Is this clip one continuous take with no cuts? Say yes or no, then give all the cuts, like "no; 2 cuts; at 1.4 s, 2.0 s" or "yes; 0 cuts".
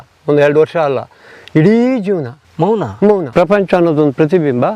no; 2 cuts; at 2.4 s, 3.3 s